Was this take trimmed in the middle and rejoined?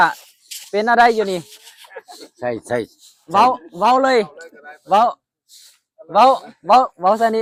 no; 0 cuts

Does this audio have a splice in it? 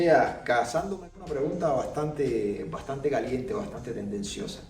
yes; 1 cut; at 1.0 s

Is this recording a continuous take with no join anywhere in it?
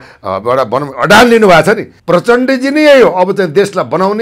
no; 1 cut; at 1.9 s

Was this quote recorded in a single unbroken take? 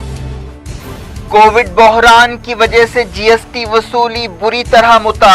yes; 0 cuts

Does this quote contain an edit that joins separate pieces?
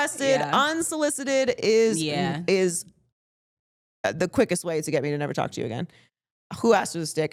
no; 0 cuts

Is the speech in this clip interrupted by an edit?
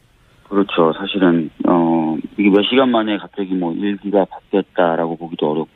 no; 0 cuts

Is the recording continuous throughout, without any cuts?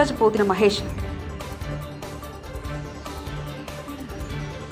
yes; 0 cuts

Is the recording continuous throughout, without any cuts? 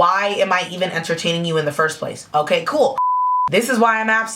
no; 1 cut; at 3.0 s

